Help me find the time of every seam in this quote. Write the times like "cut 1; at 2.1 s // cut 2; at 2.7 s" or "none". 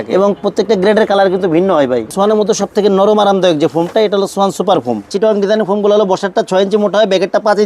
cut 1; at 2.1 s // cut 2; at 5.1 s